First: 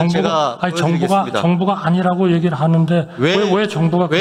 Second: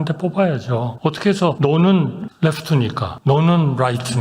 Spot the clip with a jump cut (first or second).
second